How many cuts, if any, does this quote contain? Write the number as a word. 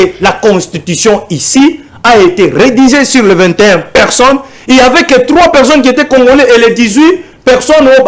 zero